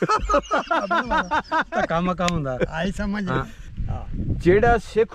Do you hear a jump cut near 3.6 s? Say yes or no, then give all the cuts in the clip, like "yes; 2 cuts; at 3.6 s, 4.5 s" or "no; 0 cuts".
yes; 1 cut; at 3.6 s